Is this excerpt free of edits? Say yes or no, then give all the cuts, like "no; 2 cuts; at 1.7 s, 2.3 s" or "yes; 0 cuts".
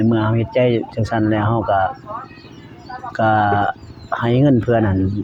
yes; 0 cuts